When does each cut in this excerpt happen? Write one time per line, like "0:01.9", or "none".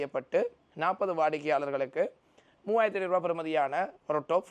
none